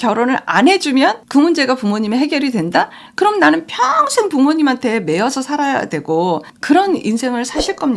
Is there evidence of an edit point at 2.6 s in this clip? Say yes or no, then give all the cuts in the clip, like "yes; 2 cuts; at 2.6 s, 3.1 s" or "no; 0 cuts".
no; 1 cut; at 6.5 s